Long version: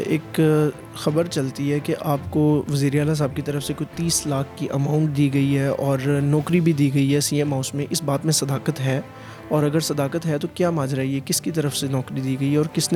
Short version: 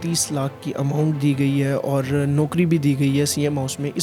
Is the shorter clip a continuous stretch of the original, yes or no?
yes